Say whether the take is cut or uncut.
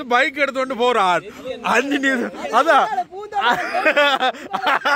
uncut